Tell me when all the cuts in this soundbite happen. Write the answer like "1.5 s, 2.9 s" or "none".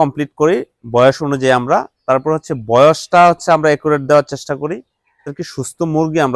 5.4 s